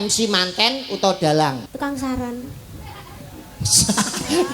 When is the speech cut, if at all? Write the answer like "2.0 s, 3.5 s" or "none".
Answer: 1.7 s